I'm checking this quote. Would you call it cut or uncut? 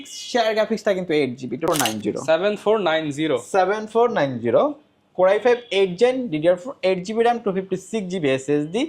cut